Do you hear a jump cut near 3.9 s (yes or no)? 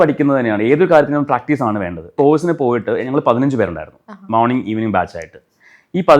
no